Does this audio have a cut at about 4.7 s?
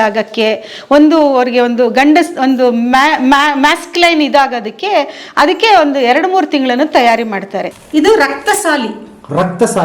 no; 1 cut; at 7.8 s

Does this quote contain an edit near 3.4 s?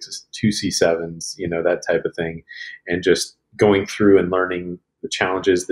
no; 0 cuts

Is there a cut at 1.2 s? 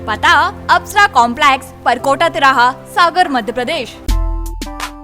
no; 1 cut; at 4.0 s

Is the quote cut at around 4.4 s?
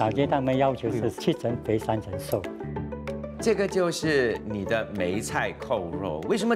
yes; 2 cuts; at 3.0 s, 4.4 s

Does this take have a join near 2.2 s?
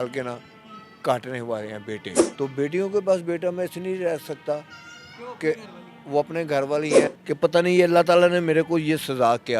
yes; 2 cuts; at 2.2 s, 7.1 s

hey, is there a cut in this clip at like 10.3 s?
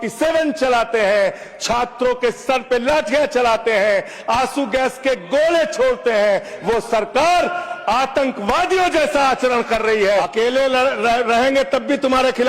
yes; 1 cut; at 10.3 s

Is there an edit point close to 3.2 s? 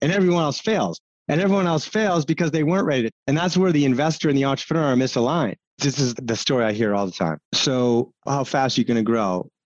yes; 4 cuts; at 3.2 s, 6.2 s, 7.5 s, 8.2 s

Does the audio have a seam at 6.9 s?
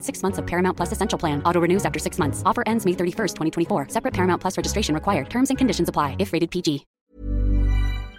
yes; 1 cut; at 6.9 s

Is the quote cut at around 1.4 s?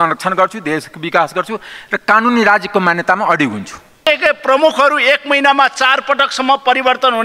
no; 1 cut; at 4.0 s

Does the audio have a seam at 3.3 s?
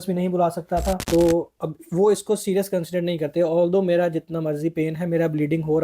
no; 1 cut; at 1.0 s

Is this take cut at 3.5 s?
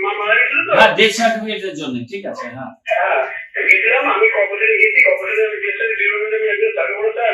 no; 0 cuts

